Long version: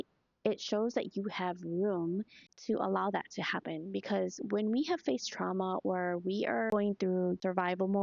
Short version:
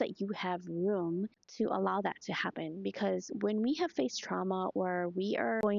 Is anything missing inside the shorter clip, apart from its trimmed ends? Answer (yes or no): yes